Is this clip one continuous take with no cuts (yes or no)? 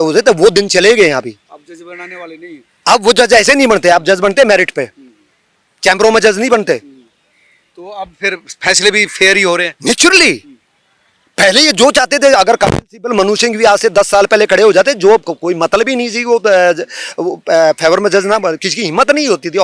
yes